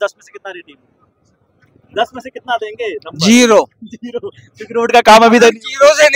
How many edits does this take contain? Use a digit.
0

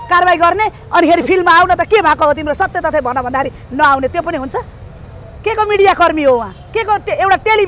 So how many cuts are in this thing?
0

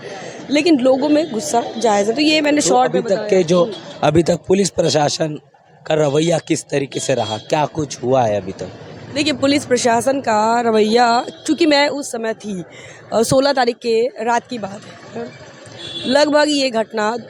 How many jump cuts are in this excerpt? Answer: 0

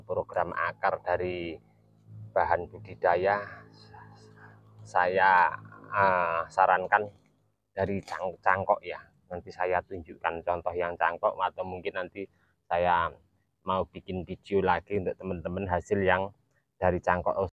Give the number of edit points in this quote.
0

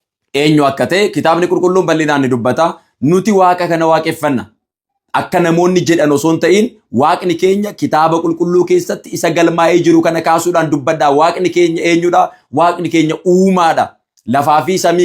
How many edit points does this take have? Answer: 0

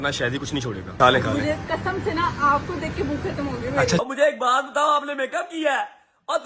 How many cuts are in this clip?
2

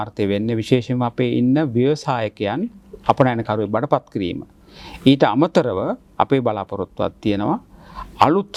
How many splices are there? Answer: 0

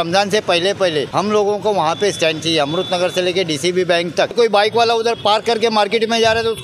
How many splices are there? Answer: 2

